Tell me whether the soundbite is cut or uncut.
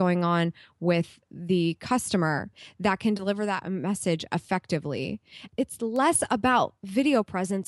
cut